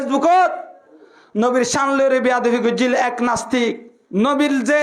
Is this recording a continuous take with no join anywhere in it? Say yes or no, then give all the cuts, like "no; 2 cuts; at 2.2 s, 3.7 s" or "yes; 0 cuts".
no; 1 cut; at 3.9 s